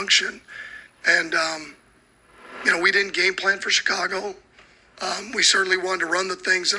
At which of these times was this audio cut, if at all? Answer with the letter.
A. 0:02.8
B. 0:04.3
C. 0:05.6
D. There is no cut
C